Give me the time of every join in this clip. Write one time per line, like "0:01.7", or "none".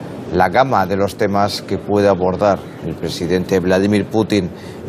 0:03.5